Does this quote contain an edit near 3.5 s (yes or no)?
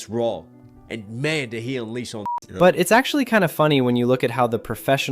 no